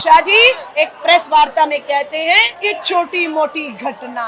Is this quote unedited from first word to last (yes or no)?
yes